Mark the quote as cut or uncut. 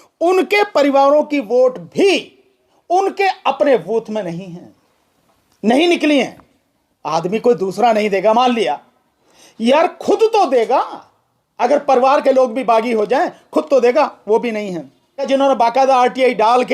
cut